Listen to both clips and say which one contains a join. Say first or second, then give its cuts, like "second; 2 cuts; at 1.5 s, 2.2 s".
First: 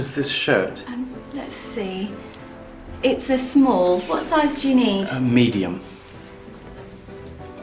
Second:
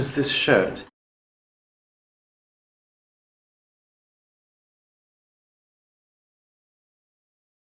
first; 2 cuts; at 0.8 s, 5.9 s